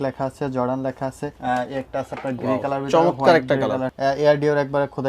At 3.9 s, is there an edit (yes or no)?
yes